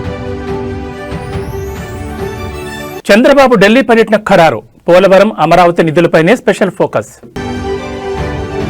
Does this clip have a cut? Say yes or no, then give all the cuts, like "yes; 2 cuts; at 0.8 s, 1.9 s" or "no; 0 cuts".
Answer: yes; 1 cut; at 2.4 s